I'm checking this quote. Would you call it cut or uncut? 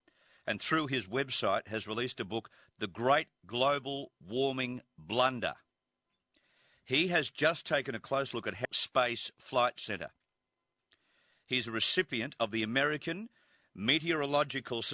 uncut